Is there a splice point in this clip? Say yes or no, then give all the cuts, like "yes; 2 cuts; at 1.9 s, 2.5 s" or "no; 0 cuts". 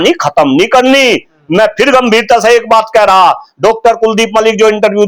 no; 0 cuts